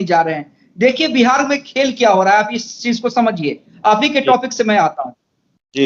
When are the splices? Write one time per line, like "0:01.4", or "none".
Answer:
none